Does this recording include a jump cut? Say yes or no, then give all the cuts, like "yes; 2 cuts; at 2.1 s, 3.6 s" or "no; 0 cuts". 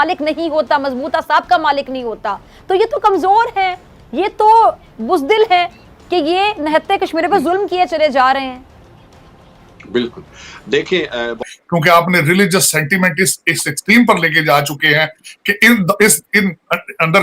yes; 1 cut; at 11.5 s